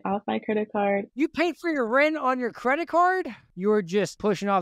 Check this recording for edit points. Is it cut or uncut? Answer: cut